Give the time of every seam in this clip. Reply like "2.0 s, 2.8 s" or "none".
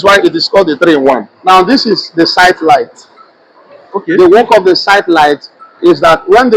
1.3 s